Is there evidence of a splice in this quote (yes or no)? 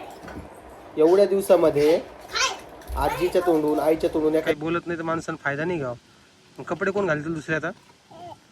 yes